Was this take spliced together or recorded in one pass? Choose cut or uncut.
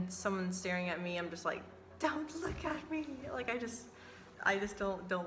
cut